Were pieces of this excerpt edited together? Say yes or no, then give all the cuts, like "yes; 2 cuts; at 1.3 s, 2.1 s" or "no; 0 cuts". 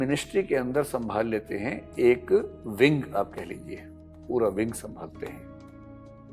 yes; 1 cut; at 5.3 s